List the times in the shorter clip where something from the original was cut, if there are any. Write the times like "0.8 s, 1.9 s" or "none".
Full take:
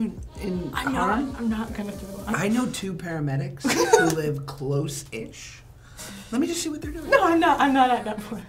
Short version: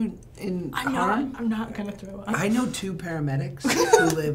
none